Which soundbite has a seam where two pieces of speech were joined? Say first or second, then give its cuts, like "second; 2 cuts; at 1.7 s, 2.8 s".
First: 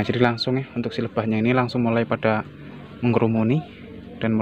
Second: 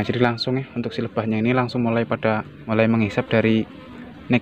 second; 1 cut; at 2.5 s